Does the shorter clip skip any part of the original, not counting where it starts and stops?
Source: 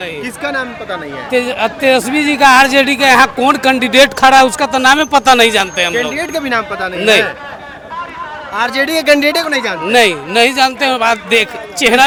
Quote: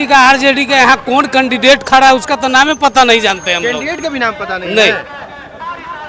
no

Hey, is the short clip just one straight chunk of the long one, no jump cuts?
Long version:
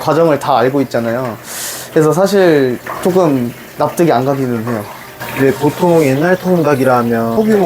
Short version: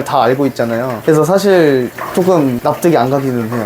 no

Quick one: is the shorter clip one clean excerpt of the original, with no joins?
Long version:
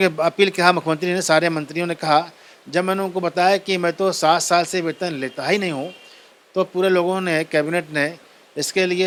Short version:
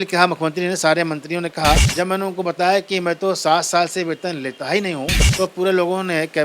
no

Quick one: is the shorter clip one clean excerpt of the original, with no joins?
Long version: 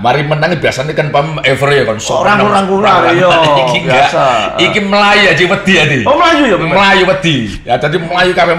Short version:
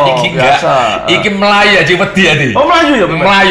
yes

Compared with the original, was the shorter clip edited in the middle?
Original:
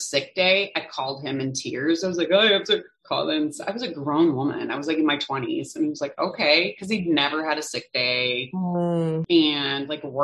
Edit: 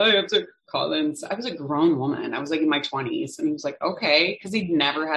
no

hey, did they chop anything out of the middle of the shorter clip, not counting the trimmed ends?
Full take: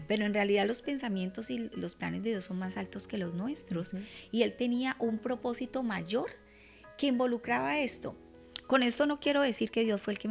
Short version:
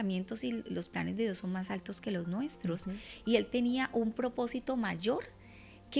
no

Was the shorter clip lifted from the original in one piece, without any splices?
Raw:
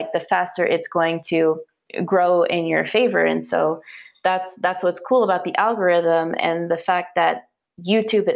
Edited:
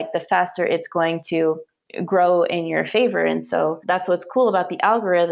no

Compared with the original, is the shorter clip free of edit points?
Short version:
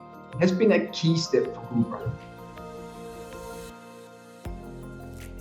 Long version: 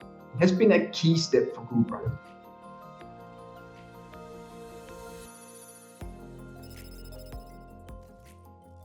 no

